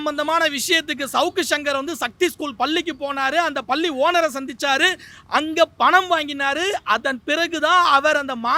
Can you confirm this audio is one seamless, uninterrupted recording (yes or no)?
yes